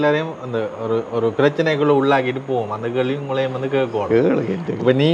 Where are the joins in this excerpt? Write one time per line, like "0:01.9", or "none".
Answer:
none